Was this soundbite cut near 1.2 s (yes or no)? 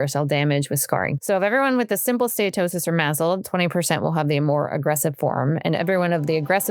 yes